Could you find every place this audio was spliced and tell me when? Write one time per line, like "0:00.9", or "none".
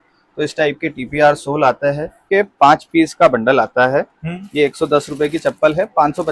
0:02.2